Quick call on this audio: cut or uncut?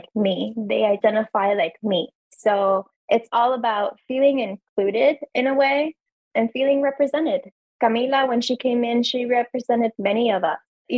cut